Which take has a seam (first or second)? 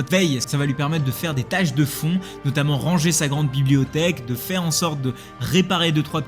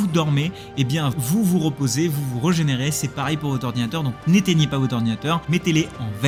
first